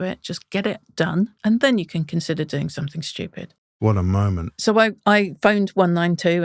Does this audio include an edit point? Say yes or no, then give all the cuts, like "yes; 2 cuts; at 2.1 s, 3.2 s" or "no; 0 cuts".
yes; 2 cuts; at 1.4 s, 4.5 s